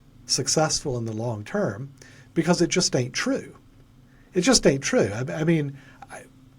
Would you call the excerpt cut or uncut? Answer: uncut